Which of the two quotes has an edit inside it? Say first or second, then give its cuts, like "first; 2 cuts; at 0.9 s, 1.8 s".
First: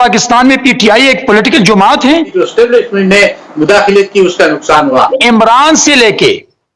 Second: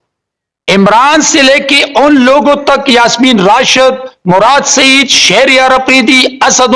first; 2 cuts; at 2.3 s, 5.2 s